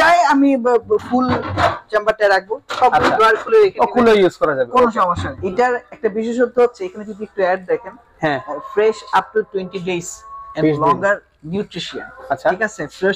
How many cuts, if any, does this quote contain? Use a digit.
1